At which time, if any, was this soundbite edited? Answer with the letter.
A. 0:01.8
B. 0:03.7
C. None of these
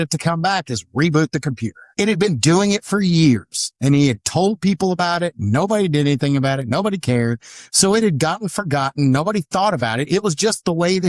A